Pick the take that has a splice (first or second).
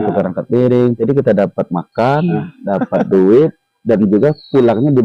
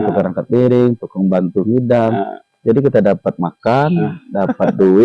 first